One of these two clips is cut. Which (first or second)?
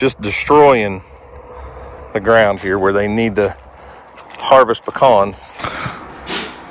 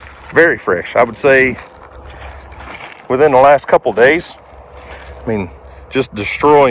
first